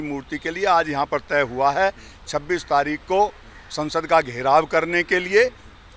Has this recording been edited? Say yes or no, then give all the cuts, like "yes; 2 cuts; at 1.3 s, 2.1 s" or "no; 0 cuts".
no; 0 cuts